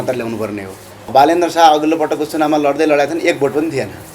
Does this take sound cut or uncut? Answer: cut